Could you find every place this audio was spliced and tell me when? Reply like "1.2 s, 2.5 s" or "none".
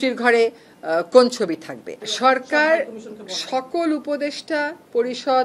2.1 s